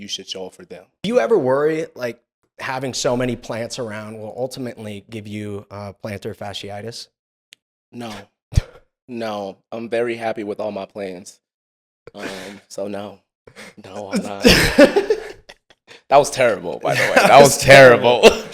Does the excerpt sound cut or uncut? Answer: cut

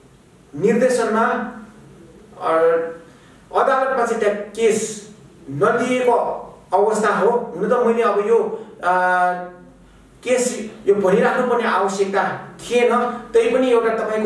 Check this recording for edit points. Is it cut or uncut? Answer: uncut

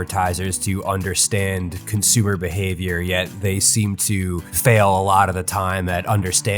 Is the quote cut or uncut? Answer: cut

